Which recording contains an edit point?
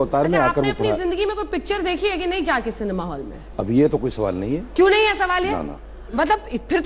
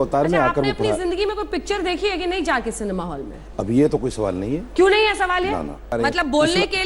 second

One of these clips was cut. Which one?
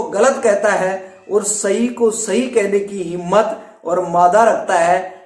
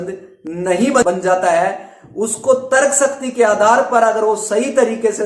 second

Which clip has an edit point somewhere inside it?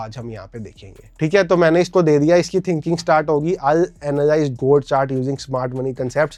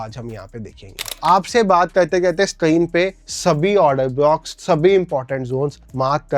second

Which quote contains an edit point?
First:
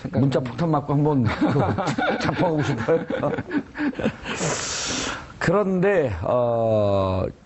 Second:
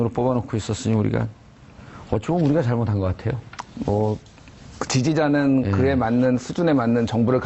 first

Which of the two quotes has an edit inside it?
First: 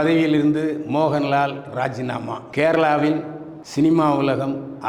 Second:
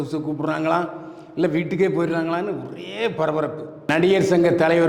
second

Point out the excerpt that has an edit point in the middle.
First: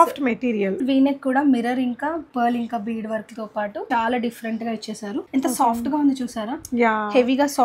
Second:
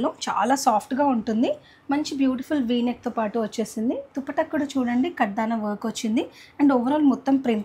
first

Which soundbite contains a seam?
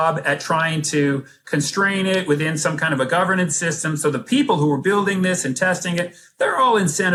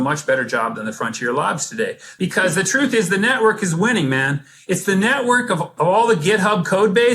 second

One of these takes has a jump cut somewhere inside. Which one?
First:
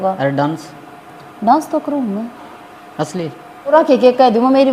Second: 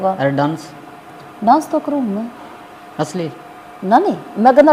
first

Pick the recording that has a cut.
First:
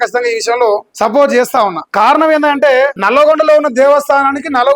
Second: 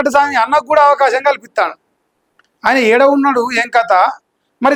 first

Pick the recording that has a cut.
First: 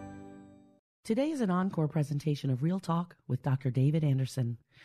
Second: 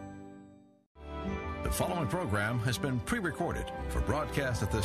second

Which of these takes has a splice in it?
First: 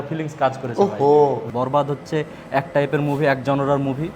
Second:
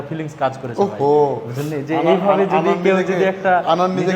first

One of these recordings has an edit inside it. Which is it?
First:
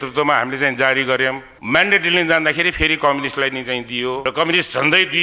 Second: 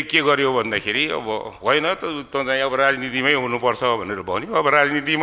first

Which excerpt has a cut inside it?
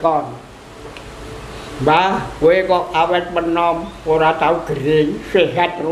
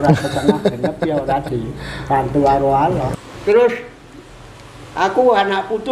second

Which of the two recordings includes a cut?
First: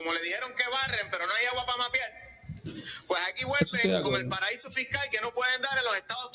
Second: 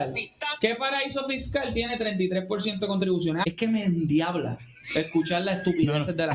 second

